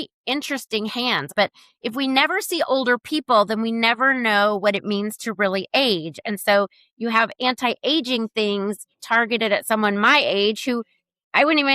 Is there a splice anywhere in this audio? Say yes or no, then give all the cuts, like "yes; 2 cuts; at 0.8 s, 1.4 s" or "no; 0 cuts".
yes; 1 cut; at 1.3 s